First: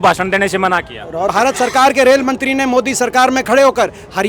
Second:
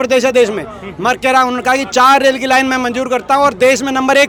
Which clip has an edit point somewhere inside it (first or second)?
first